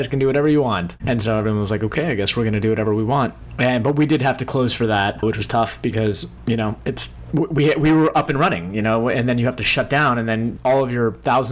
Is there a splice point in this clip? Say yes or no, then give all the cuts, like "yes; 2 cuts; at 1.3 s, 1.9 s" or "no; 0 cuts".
yes; 6 cuts; at 0.9 s, 3.4 s, 5.2 s, 6.3 s, 7.1 s, 10.5 s